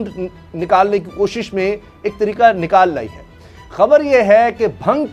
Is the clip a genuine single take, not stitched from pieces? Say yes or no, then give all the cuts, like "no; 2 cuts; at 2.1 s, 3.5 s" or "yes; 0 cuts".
yes; 0 cuts